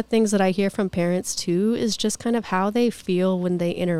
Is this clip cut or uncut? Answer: uncut